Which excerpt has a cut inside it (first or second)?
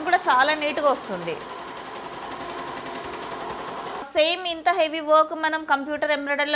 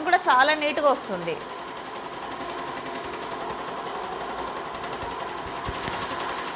first